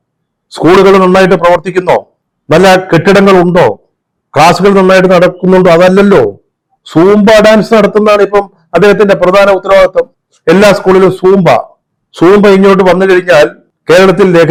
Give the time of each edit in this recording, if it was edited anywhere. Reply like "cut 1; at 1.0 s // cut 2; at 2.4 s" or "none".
none

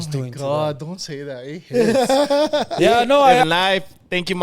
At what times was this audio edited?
cut 1; at 3.4 s

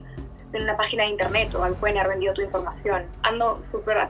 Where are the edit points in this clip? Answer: cut 1; at 3.1 s

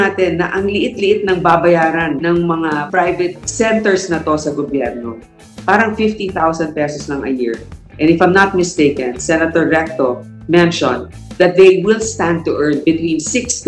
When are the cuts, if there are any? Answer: cut 1; at 2.4 s

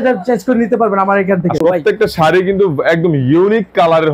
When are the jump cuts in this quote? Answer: cut 1; at 1.6 s

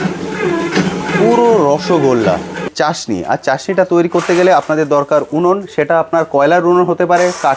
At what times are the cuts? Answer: cut 1; at 2.7 s

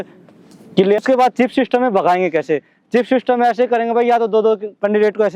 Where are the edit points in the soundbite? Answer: cut 1; at 1.0 s

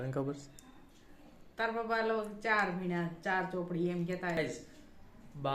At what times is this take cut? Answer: cut 1; at 4.4 s

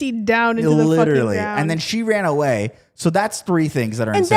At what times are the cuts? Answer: none

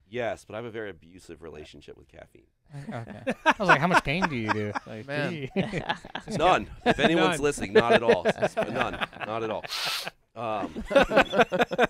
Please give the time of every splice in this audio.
cut 1; at 4.0 s

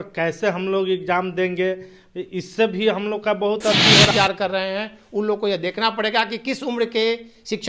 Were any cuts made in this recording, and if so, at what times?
cut 1; at 4.1 s

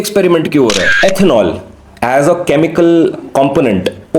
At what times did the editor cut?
cut 1; at 0.9 s

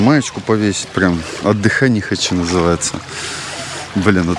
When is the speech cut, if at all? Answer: none

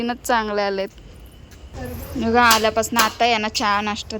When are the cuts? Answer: cut 1; at 1.7 s

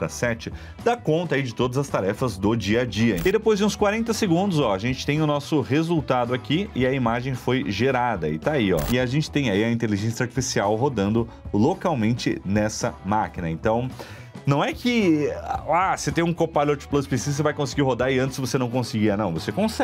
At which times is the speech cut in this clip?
cut 1; at 3.2 s // cut 2; at 8.8 s

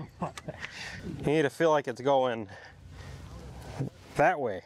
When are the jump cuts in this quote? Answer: cut 1; at 0.9 s

